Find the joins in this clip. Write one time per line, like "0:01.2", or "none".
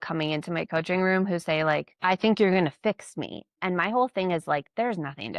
0:01.9
0:03.6